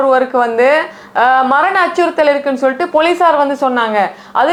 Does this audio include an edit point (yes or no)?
no